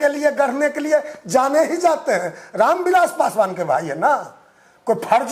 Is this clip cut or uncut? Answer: uncut